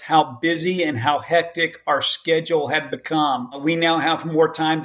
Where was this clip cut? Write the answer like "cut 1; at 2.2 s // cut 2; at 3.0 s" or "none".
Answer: cut 1; at 3.6 s